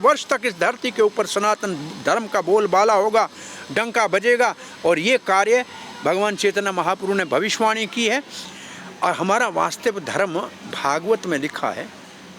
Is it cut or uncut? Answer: cut